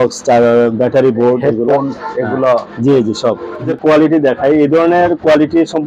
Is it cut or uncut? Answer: cut